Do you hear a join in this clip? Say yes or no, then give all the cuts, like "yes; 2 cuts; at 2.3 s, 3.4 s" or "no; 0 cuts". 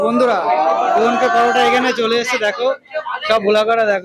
no; 0 cuts